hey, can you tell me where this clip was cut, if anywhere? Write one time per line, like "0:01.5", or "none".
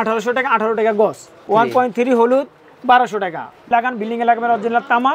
0:01.5
0:03.7